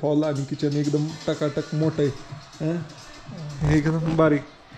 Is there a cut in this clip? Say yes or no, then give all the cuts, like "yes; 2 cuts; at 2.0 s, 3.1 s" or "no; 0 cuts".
no; 0 cuts